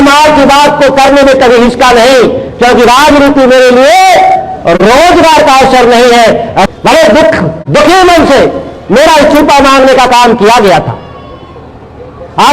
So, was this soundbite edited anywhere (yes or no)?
yes